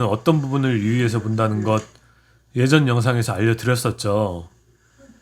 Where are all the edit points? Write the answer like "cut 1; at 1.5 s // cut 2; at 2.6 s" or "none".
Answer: none